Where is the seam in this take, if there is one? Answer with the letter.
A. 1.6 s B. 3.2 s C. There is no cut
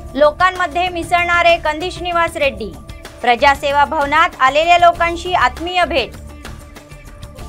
C